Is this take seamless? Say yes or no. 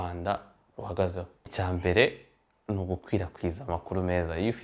no